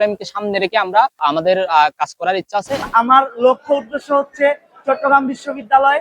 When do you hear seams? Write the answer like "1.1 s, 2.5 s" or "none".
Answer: 1.2 s, 2.9 s